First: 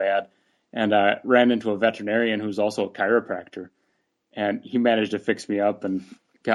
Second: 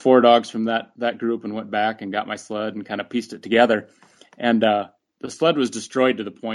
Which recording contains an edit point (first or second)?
second